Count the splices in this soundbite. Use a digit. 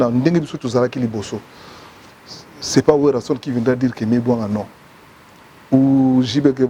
0